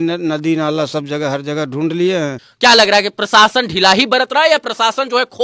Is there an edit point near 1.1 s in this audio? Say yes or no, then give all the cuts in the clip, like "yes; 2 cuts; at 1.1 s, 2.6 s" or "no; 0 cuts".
no; 1 cut; at 2.4 s